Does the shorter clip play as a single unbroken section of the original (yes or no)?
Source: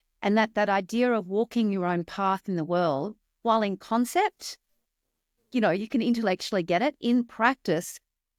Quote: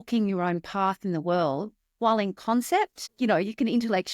no